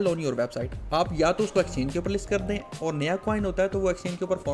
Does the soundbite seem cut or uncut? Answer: uncut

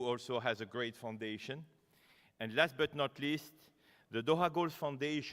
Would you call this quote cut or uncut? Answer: cut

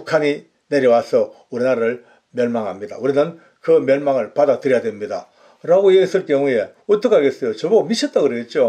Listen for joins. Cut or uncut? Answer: uncut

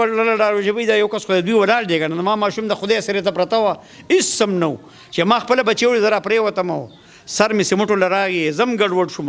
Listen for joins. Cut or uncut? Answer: uncut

